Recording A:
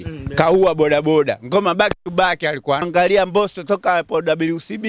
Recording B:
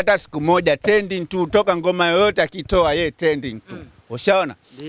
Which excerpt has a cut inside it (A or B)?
A